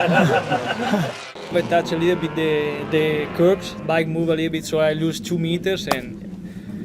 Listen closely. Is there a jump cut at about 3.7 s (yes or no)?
yes